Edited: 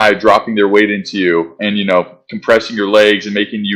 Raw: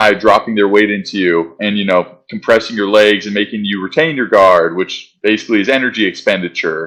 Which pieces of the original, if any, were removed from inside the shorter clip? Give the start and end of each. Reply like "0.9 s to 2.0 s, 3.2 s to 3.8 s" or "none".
none